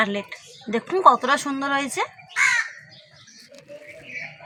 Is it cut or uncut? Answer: uncut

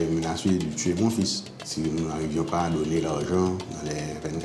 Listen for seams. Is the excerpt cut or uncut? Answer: cut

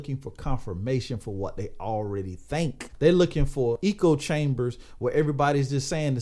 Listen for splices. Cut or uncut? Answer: cut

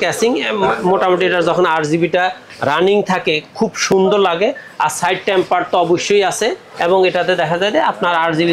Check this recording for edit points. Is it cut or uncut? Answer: uncut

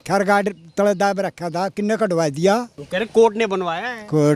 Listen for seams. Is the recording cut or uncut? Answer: cut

